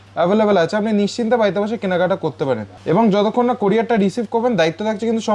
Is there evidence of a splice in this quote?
yes; 1 cut; at 2.7 s

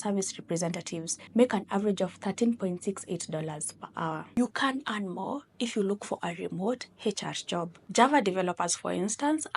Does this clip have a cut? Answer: yes; 2 cuts; at 4.3 s, 7.8 s

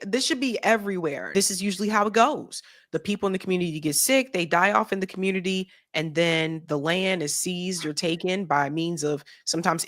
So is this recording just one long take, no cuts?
no; 1 cut; at 1.2 s

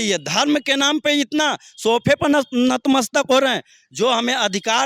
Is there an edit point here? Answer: no; 0 cuts

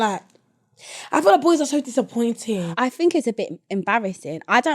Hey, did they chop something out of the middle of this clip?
yes; 1 cut; at 2.7 s

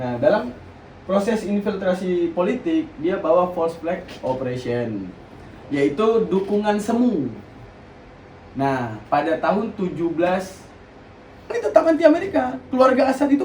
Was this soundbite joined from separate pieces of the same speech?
yes; 1 cut; at 11.5 s

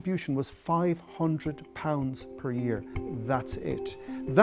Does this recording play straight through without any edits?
yes; 0 cuts

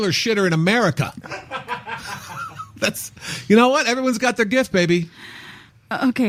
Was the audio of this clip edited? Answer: no; 0 cuts

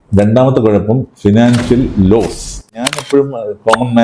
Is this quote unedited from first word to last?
no; 1 cut; at 3.0 s

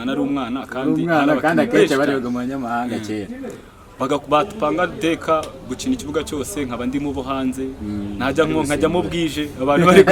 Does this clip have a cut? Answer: no; 0 cuts

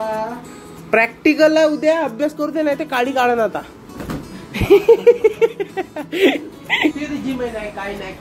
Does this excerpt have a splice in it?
yes; 1 cut; at 7.0 s

